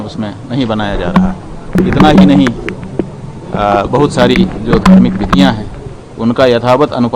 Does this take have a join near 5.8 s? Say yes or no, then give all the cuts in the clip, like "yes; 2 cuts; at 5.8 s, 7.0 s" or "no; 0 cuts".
no; 1 cut; at 1.7 s